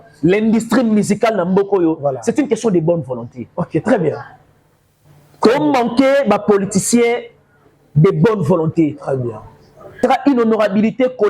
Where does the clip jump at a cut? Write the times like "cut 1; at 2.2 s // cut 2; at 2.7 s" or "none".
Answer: cut 1; at 10.0 s